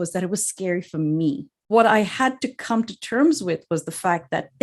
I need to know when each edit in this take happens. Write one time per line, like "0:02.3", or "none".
0:01.7